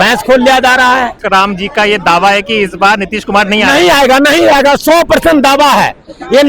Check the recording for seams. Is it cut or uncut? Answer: cut